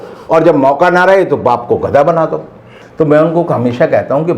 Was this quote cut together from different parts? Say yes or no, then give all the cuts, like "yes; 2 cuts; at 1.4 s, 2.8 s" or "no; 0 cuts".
yes; 1 cut; at 2.8 s